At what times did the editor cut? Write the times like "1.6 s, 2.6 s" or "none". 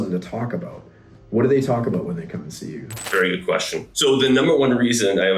3.1 s, 3.9 s